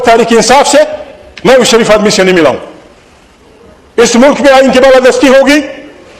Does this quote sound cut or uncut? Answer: uncut